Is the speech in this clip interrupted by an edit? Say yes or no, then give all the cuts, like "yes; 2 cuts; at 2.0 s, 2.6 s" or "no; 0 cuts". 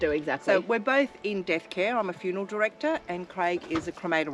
no; 0 cuts